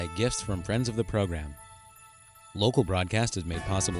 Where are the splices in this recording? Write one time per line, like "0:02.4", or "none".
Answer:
none